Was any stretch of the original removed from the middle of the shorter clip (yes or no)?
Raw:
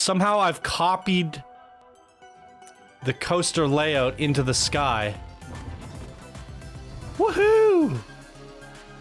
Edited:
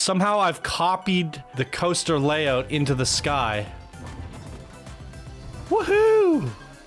yes